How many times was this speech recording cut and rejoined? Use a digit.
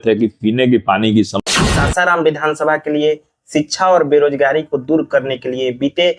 1